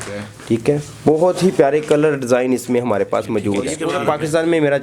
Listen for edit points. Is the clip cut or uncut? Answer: cut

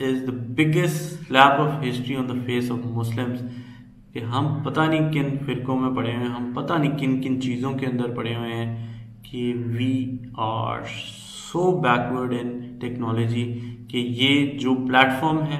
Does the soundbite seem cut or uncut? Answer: uncut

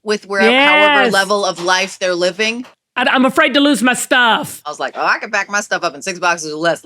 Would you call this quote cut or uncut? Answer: cut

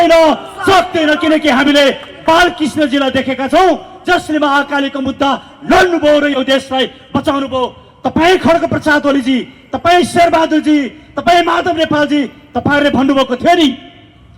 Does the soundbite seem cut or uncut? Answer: uncut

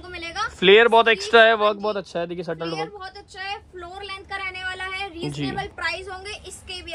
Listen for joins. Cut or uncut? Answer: uncut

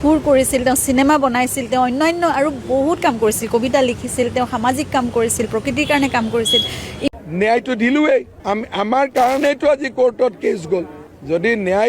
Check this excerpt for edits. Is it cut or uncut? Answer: cut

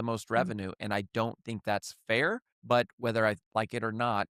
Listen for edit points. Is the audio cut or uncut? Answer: cut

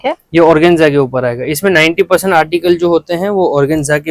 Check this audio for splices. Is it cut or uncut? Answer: uncut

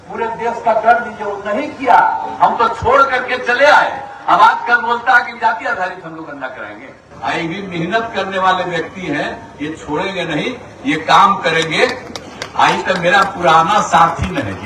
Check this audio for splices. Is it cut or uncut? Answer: cut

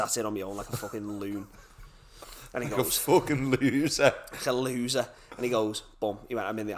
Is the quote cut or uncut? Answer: uncut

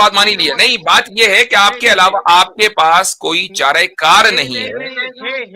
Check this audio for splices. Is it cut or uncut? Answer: uncut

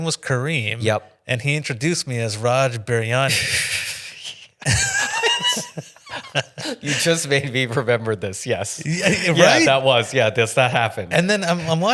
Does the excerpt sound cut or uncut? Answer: uncut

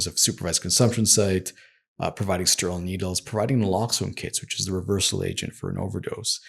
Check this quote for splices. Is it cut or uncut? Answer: uncut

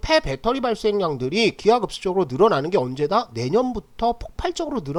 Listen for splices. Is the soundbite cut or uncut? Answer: uncut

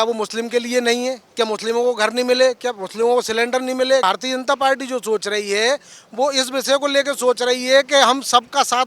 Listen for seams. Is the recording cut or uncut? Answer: cut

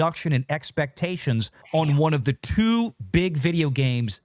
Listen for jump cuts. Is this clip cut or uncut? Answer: cut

